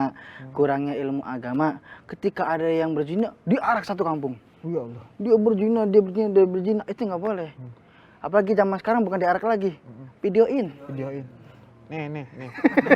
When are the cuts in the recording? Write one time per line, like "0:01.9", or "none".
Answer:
none